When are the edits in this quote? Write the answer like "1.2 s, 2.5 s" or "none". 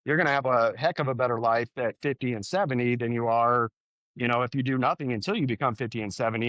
none